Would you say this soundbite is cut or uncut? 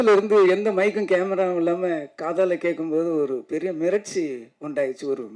uncut